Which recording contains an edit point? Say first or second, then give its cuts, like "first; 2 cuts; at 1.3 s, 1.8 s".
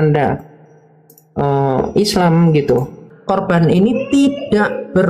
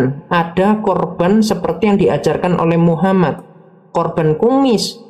first; 1 cut; at 3.1 s